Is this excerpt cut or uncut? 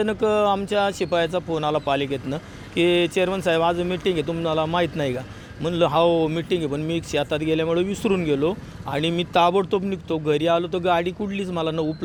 uncut